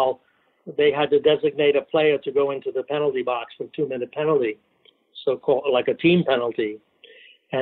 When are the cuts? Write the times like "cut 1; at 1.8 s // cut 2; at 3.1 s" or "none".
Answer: none